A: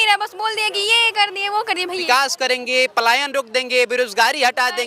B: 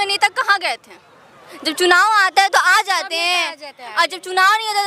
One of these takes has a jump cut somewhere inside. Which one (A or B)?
A